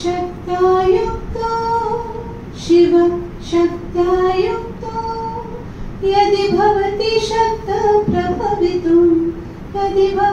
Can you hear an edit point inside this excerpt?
no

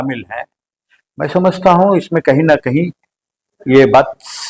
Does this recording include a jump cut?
no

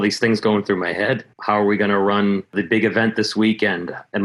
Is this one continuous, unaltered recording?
no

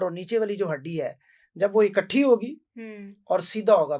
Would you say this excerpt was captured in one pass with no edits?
yes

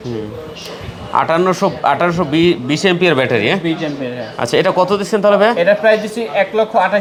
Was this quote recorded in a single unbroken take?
yes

